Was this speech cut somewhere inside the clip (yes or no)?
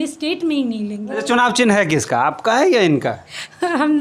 yes